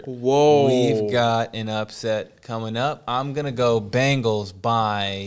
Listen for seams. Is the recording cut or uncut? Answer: uncut